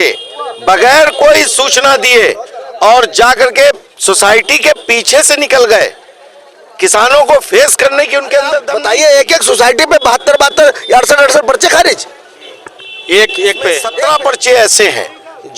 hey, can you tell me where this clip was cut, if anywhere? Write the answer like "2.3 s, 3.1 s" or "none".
8.7 s, 13.9 s